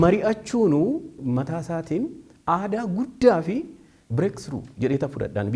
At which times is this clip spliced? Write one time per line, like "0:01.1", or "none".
0:01.2